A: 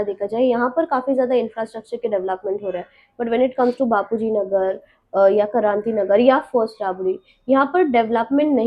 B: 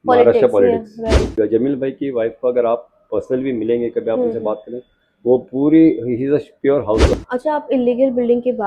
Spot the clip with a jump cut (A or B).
B